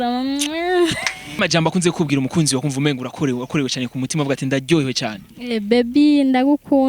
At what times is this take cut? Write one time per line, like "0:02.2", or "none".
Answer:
0:01.3